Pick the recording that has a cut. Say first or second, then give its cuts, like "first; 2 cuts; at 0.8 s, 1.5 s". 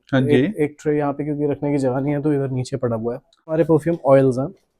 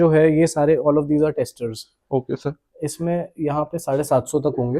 first; 1 cut; at 3.5 s